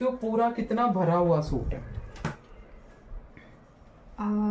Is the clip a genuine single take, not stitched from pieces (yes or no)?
yes